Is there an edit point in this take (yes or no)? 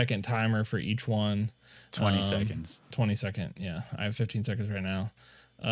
no